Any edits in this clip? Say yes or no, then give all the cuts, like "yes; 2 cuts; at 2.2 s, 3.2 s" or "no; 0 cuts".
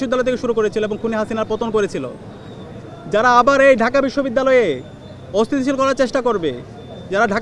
no; 0 cuts